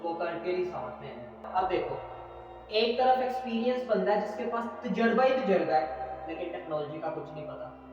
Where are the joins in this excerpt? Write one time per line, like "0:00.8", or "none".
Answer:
0:01.4